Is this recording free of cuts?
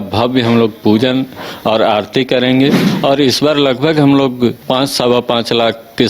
no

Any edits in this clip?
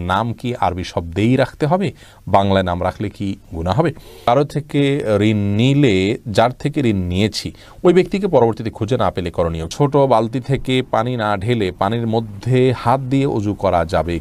yes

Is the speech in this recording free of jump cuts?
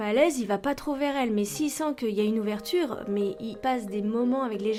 yes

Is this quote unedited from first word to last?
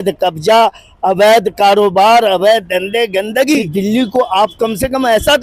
no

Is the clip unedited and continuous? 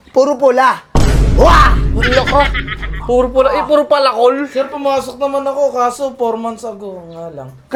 yes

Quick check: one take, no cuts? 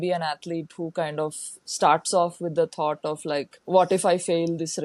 no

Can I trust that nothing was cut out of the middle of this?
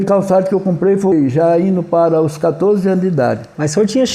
no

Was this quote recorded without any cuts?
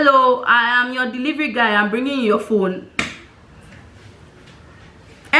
yes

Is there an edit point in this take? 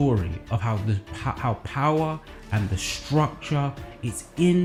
no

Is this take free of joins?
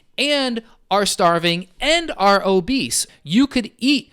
no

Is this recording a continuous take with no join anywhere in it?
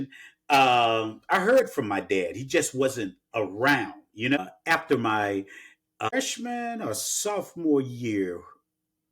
no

